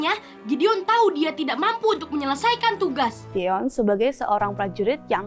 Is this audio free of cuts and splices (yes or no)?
no